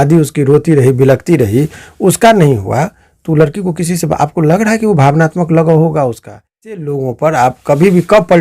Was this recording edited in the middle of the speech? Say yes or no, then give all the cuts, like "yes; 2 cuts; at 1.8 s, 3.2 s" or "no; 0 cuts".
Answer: yes; 1 cut; at 6.8 s